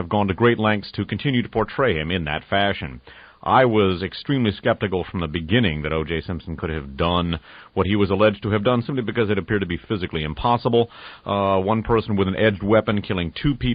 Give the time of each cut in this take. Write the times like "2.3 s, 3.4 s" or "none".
8.4 s